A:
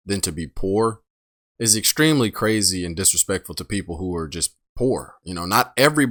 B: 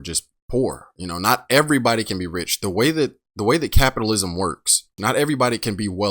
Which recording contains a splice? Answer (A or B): B